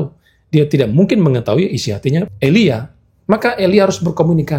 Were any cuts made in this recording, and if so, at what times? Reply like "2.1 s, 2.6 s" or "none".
2.3 s